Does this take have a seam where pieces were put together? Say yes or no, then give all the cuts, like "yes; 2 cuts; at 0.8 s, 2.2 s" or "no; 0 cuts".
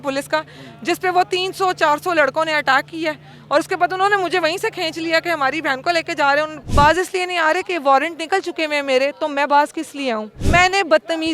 yes; 2 cuts; at 6.6 s, 10.4 s